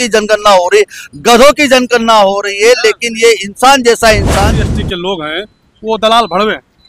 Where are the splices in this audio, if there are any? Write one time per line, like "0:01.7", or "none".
0:04.6